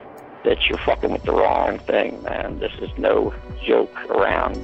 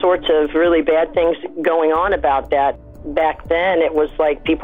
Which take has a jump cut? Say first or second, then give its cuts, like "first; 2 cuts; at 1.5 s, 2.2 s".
second; 1 cut; at 2.8 s